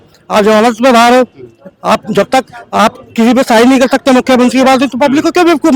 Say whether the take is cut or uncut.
uncut